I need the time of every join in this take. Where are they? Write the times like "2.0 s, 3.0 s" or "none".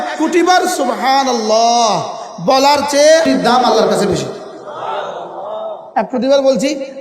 3.3 s, 5.8 s